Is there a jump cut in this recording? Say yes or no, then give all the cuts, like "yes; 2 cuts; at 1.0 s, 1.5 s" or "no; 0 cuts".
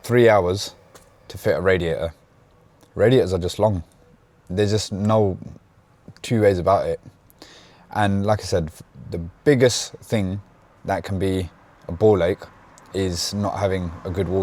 no; 0 cuts